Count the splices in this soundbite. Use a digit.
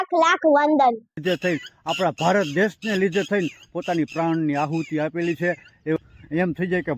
2